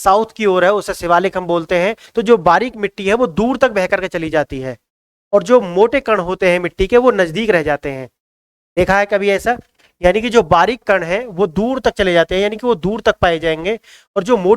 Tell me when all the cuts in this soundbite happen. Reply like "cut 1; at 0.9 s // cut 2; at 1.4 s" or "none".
cut 1; at 2.0 s

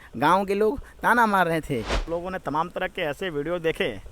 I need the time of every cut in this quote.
cut 1; at 2.0 s

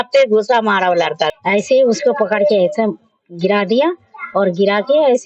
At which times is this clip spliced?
cut 1; at 1.3 s

